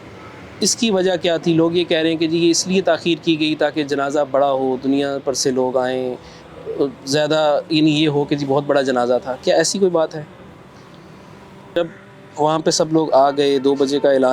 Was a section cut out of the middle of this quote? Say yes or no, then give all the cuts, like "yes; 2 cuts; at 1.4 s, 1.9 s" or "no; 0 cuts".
yes; 1 cut; at 11.8 s